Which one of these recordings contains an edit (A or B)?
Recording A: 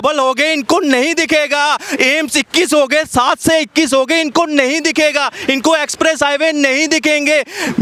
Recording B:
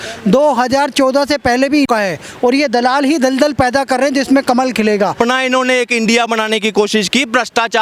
B